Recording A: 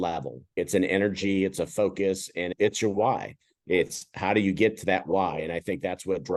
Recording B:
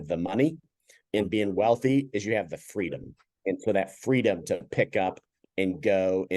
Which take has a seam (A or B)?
B